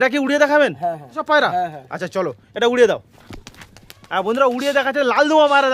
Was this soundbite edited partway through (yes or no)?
yes